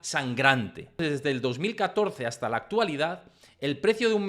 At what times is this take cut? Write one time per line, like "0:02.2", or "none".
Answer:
0:01.0